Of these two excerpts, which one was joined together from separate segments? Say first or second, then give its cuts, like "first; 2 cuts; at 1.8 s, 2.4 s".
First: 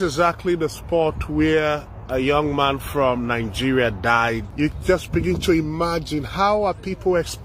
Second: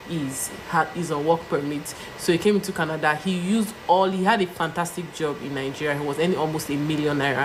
first; 1 cut; at 4.5 s